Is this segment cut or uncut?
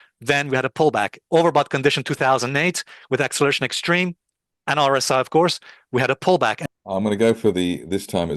cut